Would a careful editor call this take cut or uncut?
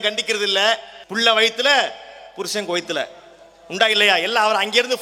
cut